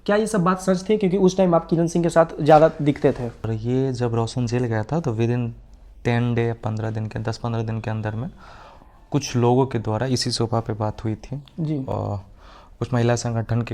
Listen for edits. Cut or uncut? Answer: cut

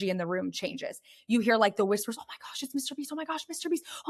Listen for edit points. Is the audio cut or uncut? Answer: uncut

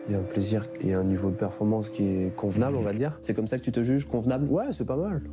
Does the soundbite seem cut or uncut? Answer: cut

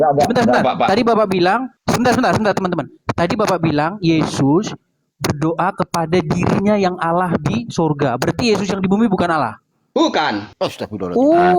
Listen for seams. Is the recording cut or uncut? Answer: cut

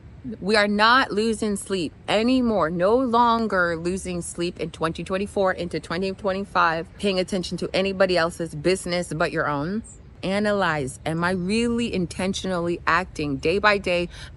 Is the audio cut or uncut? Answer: cut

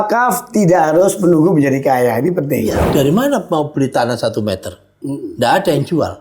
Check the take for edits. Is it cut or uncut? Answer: cut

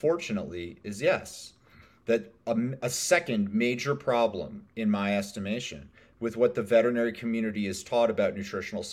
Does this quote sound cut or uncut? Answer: uncut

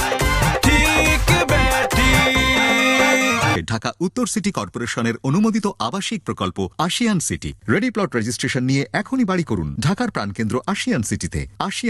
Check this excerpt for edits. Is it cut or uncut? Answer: cut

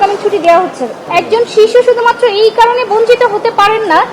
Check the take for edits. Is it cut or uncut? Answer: cut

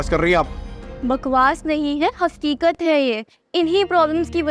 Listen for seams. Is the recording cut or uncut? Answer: uncut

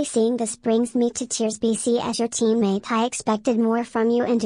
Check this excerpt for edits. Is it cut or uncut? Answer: uncut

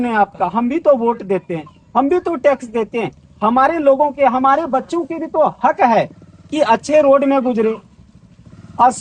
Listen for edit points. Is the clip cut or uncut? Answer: uncut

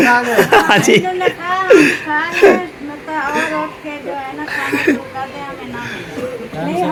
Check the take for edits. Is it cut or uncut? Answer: uncut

